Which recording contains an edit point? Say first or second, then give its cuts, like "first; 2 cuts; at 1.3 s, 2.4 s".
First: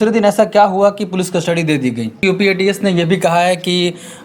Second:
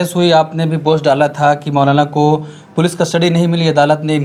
first; 1 cut; at 2.2 s